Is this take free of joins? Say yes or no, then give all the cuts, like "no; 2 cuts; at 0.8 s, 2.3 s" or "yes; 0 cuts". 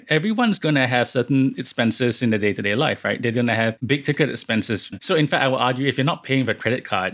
no; 2 cuts; at 3.8 s, 5.0 s